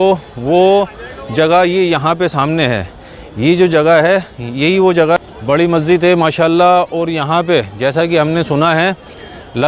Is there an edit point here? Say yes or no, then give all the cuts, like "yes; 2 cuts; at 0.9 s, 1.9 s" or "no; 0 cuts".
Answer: yes; 1 cut; at 5.2 s